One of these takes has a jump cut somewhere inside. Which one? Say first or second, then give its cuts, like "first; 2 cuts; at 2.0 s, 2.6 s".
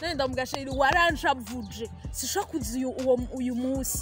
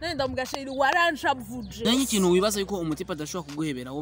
second; 1 cut; at 1.7 s